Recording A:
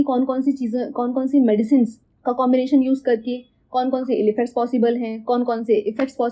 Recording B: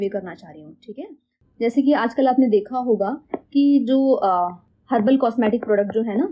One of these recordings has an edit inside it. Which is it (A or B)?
B